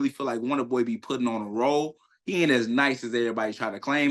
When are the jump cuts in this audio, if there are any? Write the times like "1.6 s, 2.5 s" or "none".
none